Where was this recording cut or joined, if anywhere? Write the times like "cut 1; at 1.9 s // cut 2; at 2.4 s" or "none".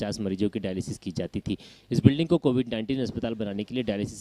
none

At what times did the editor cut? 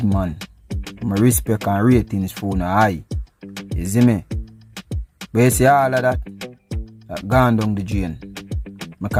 none

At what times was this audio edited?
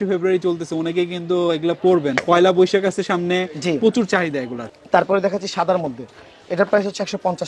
cut 1; at 2.2 s // cut 2; at 4.6 s

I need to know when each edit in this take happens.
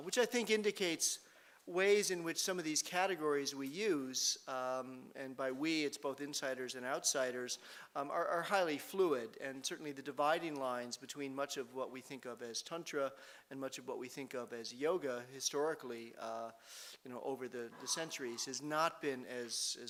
none

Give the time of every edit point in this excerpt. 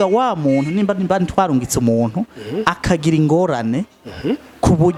none

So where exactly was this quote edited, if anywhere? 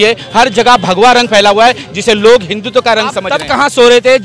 cut 1; at 3.3 s

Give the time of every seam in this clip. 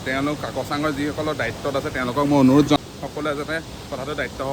cut 1; at 2.8 s

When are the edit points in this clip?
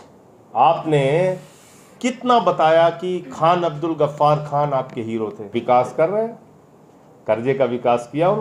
cut 1; at 5.5 s

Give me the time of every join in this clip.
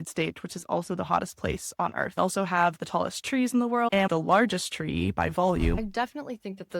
cut 1; at 2.2 s // cut 2; at 3.9 s // cut 3; at 5.8 s

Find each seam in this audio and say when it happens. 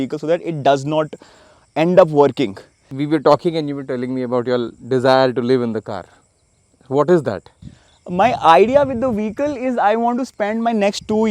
cut 1; at 2.9 s

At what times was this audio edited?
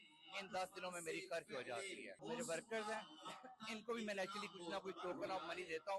cut 1; at 2.2 s

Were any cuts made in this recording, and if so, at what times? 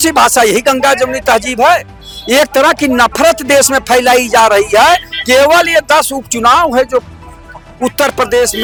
none

